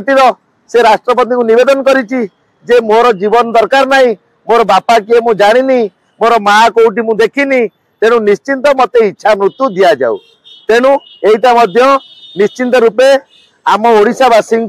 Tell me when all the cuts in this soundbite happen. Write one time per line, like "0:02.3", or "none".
none